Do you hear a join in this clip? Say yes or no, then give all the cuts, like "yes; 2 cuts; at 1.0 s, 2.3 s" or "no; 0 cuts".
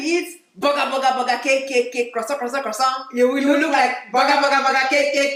no; 0 cuts